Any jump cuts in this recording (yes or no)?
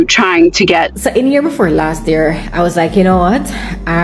yes